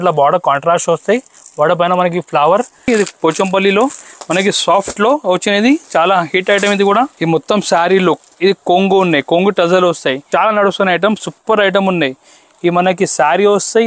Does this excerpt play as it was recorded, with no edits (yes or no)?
no